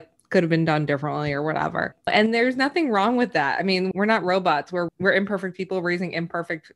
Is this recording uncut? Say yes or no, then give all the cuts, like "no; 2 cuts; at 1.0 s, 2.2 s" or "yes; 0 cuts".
no; 3 cuts; at 2.1 s, 3.9 s, 4.9 s